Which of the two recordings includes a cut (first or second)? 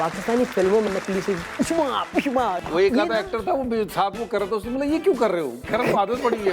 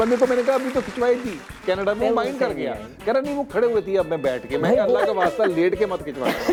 first